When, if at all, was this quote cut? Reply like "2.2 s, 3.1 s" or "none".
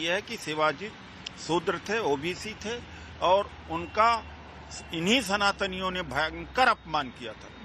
none